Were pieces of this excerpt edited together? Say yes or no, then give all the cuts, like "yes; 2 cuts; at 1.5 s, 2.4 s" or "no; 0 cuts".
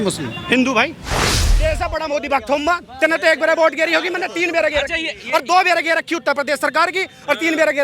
yes; 1 cut; at 1.4 s